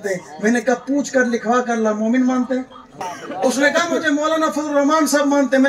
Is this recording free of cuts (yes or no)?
no